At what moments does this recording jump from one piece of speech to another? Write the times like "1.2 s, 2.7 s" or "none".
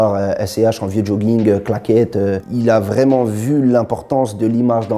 2.4 s